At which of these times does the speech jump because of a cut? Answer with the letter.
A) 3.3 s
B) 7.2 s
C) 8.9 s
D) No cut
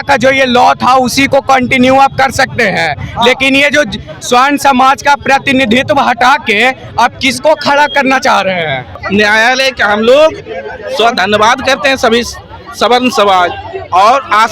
C